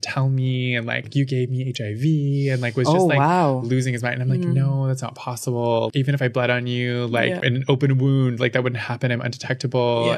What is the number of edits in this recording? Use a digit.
2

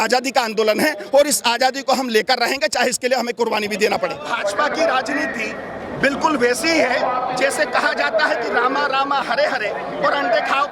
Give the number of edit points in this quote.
1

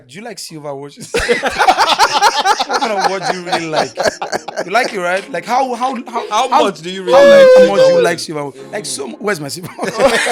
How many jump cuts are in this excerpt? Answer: 0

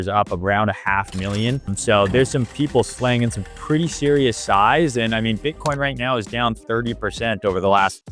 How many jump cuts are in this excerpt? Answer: 1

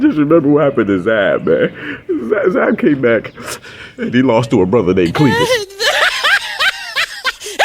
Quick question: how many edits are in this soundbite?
1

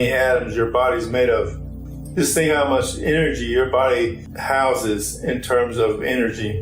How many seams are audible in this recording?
1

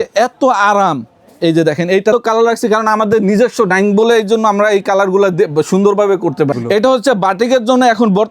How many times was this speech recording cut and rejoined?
2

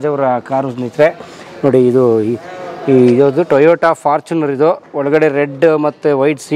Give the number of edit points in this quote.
0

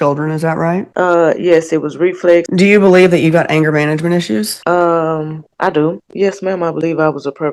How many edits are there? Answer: 4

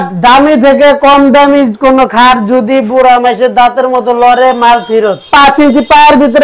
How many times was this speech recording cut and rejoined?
1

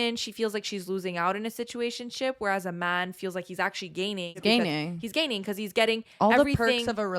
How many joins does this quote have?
1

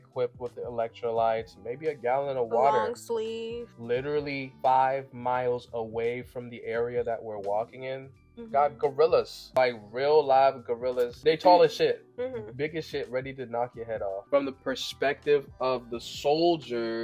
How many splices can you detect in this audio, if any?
3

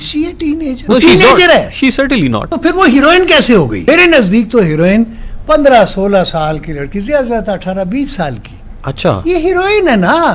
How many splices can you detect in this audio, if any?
3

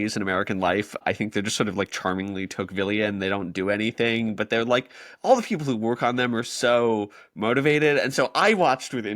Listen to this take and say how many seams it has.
1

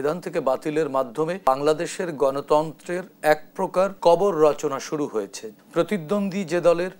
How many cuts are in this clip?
3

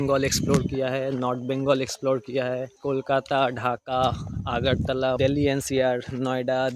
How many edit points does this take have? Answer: 2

